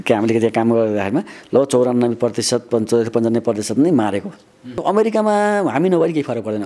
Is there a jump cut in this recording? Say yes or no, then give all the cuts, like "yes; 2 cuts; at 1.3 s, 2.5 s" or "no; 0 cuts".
yes; 1 cut; at 4.8 s